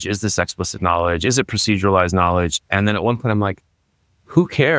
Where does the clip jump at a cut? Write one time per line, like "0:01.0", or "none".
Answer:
none

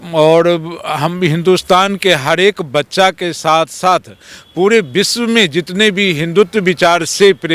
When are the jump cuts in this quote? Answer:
none

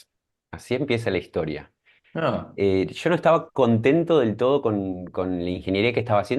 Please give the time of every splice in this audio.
none

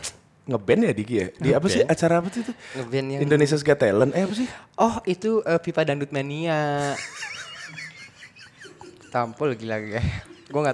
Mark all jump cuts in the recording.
none

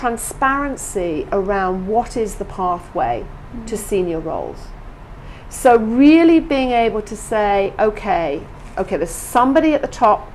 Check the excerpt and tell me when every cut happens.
none

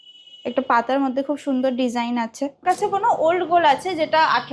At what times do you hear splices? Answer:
0:02.6

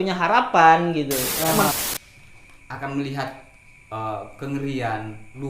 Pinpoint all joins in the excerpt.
0:01.7

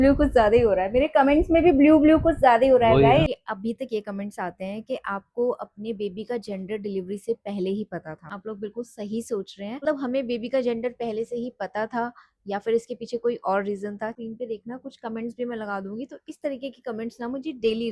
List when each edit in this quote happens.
0:03.3
0:08.3
0:09.8
0:14.1

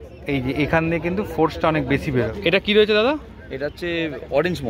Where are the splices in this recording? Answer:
0:02.3

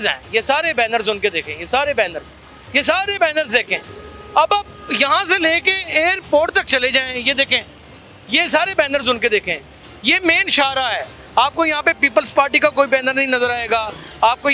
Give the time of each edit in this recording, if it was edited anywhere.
none

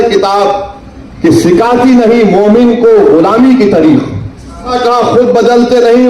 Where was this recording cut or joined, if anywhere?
0:04.7

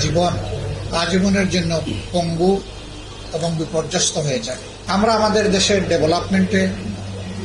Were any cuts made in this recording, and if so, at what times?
0:04.7

